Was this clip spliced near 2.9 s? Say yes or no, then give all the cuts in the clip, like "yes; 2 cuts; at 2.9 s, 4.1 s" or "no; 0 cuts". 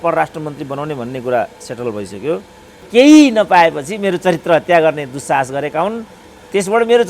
yes; 1 cut; at 2.9 s